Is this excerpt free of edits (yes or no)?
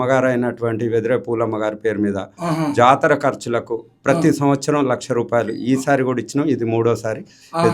yes